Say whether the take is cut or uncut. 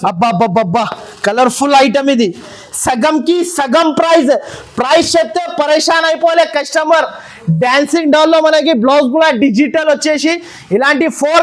uncut